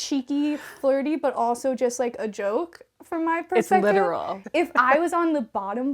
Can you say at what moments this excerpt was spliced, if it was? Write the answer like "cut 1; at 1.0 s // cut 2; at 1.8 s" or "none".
cut 1; at 4.4 s